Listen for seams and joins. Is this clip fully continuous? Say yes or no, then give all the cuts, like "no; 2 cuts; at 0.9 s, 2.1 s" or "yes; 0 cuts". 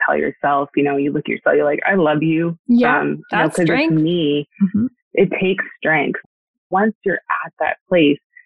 no; 1 cut; at 6.2 s